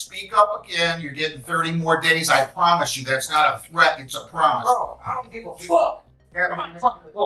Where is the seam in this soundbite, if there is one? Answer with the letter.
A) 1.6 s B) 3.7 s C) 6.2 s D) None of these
C